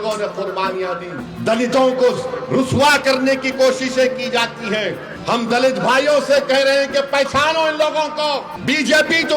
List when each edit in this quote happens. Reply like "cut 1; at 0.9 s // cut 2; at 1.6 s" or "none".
cut 1; at 1.2 s // cut 2; at 5.1 s // cut 3; at 8.5 s

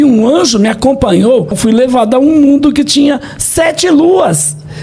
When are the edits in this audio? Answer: cut 1; at 1.6 s

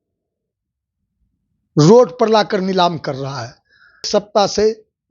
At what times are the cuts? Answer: cut 1; at 4.0 s

